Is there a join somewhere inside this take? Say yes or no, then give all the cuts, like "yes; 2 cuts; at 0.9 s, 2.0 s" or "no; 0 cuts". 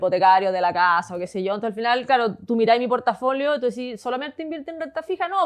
no; 0 cuts